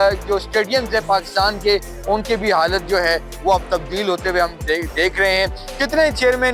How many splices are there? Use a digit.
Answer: 0